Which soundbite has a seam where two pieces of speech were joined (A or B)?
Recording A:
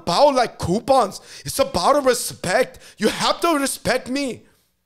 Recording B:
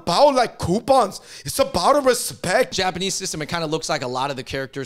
B